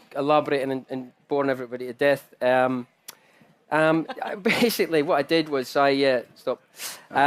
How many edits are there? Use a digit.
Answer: 1